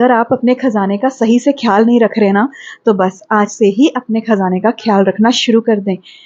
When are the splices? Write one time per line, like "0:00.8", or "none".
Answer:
none